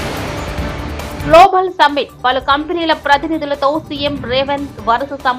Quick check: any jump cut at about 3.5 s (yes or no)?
no